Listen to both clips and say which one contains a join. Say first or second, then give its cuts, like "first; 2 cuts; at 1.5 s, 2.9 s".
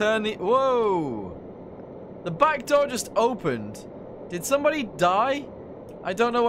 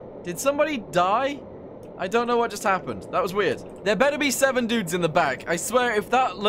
second; 1 cut; at 3.7 s